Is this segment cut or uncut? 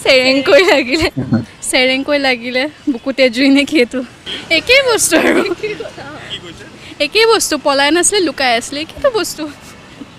uncut